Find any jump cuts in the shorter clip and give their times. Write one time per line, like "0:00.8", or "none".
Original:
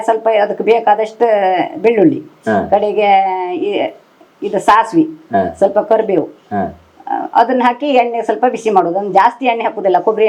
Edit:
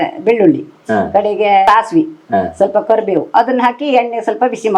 0:01.7
0:03.3